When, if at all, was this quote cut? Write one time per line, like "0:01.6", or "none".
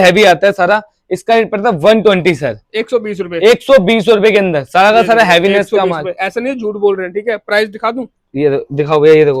none